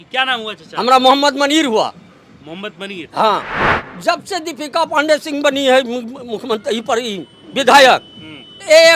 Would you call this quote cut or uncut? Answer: cut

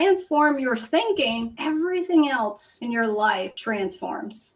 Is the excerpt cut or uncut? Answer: cut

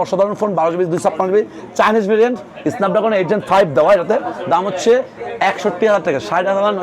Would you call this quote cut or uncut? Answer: uncut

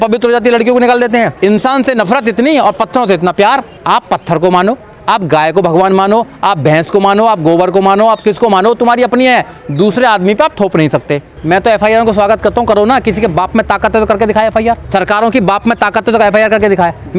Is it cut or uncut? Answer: cut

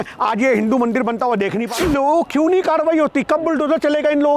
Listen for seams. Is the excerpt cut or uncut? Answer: cut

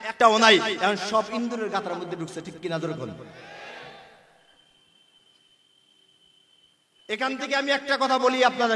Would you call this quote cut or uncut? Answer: uncut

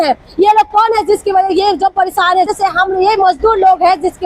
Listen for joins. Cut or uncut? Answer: uncut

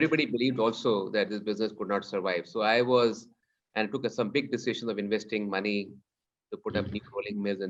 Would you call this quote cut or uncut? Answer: uncut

